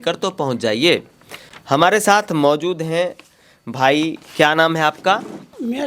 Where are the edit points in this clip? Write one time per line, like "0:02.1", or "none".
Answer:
none